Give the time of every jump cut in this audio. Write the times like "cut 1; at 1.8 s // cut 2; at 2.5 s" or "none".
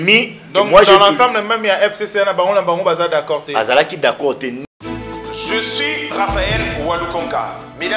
cut 1; at 4.6 s